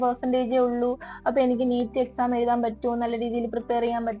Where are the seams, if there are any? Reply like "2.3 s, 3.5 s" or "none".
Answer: none